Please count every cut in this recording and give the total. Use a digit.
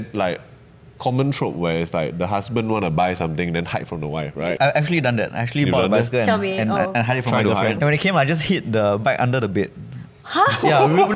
2